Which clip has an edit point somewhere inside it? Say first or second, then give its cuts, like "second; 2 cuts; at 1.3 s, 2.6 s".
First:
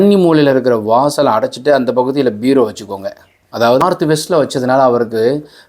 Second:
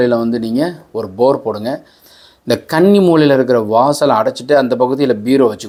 first; 1 cut; at 3.8 s